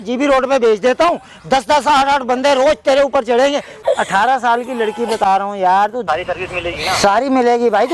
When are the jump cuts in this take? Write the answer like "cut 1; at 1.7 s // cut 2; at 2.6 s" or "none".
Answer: cut 1; at 3.8 s // cut 2; at 6.0 s